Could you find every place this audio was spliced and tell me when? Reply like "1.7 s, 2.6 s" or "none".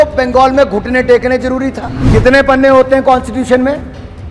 1.9 s